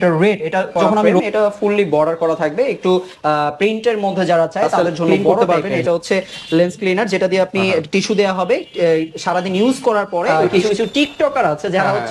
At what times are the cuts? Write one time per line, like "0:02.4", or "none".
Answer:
0:01.0
0:05.2
0:10.5